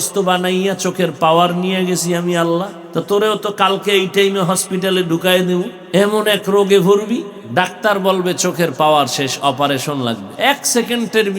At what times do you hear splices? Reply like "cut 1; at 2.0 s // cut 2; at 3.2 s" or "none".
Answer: cut 1; at 2.8 s // cut 2; at 5.8 s // cut 3; at 7.4 s // cut 4; at 10.3 s